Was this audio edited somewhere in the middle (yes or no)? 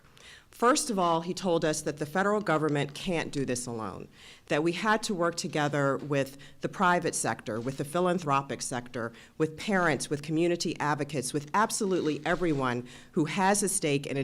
yes